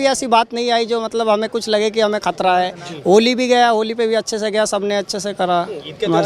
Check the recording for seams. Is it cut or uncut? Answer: uncut